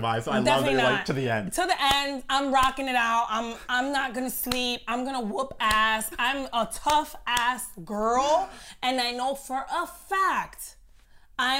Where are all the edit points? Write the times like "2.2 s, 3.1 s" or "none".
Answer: none